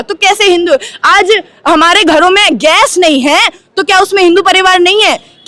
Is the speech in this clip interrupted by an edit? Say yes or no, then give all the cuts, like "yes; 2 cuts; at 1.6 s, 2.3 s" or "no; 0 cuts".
no; 0 cuts